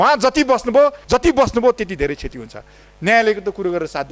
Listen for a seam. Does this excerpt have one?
yes; 1 cut; at 1.0 s

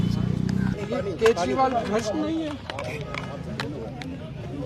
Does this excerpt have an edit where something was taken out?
no; 0 cuts

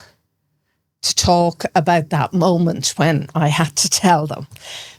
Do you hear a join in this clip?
no; 0 cuts

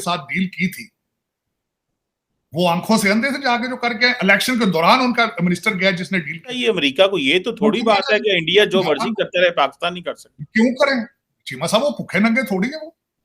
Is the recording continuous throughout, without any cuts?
no; 1 cut; at 6.6 s

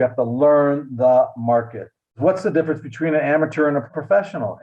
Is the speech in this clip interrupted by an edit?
yes; 1 cut; at 2.2 s

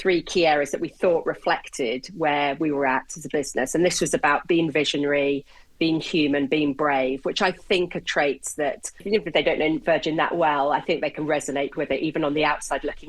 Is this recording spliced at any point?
yes; 1 cut; at 9.0 s

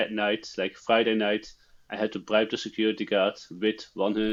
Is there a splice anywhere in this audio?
no; 0 cuts

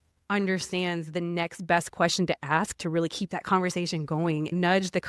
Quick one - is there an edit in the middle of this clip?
no; 0 cuts

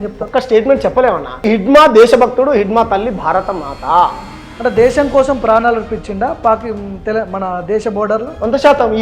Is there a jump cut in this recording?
yes; 1 cut; at 1.4 s

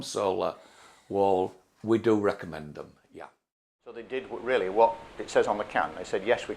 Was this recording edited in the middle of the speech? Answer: yes; 1 cut; at 4.1 s

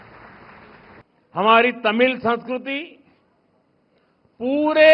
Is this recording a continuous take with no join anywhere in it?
no; 1 cut; at 1.0 s

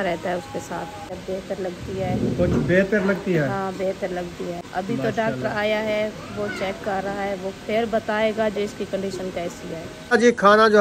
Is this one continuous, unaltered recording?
no; 3 cuts; at 1.2 s, 4.6 s, 10.1 s

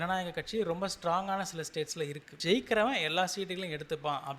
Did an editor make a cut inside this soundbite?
yes; 1 cut; at 2.3 s

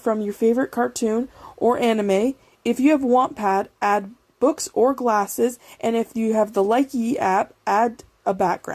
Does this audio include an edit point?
no; 0 cuts

